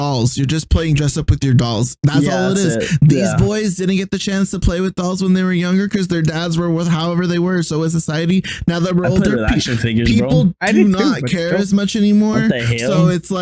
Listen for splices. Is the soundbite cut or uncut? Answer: uncut